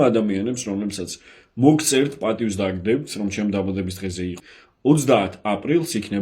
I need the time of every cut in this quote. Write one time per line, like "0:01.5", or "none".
0:04.3

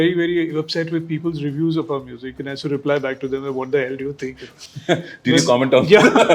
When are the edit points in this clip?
none

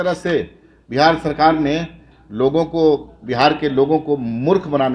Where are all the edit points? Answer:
none

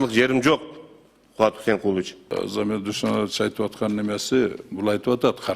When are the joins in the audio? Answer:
0:02.2

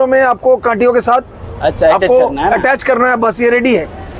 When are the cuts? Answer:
none

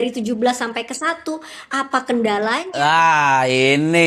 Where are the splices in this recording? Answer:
0:02.7

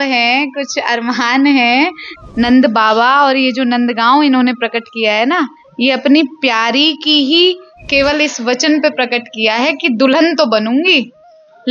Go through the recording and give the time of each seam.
0:02.1

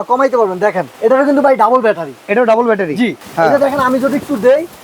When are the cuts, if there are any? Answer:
0:00.9
0:03.2

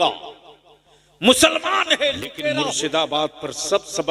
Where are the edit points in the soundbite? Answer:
0:02.6

